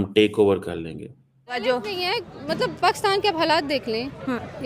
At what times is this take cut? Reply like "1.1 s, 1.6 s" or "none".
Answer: 1.6 s